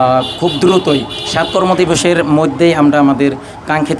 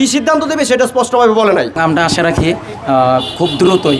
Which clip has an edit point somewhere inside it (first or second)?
second